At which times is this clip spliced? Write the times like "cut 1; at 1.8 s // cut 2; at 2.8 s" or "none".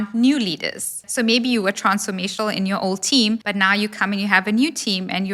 cut 1; at 1.0 s // cut 2; at 3.5 s